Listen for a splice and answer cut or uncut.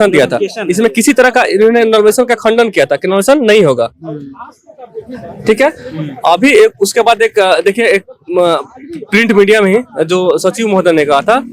uncut